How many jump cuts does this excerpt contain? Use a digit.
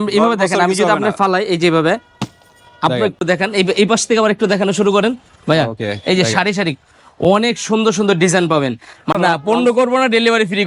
2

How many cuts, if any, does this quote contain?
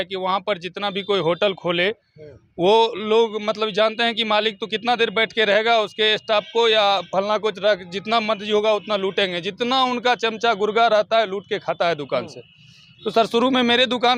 0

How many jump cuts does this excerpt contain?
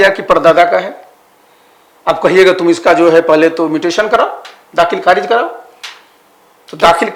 0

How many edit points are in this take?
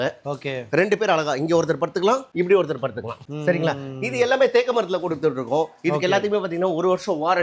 0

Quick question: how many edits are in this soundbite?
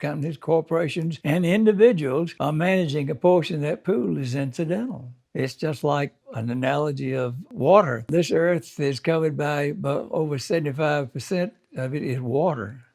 2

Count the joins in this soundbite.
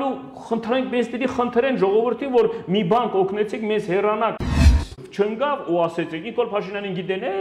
1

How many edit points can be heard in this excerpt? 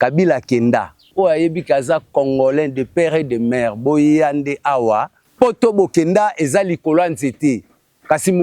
2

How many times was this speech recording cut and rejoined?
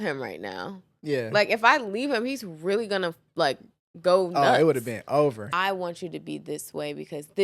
1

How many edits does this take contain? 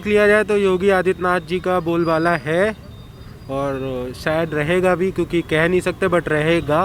0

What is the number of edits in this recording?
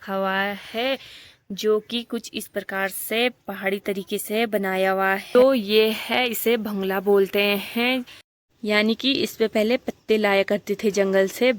2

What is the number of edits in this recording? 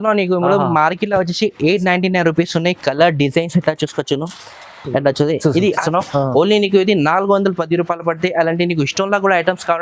1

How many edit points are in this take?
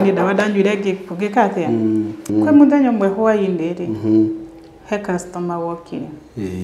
1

